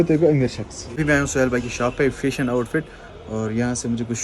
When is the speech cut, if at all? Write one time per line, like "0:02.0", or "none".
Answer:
0:00.9